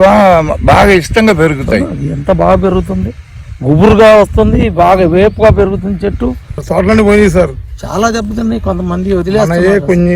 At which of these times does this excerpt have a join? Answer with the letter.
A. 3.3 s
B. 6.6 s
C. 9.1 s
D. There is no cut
B